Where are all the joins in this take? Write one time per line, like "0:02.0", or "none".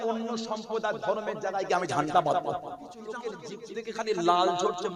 0:03.2